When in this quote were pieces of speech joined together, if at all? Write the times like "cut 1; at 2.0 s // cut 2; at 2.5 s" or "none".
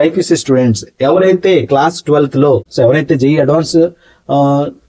cut 1; at 2.7 s